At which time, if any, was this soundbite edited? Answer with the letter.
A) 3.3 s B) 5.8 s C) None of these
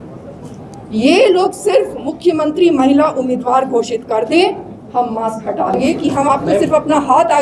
B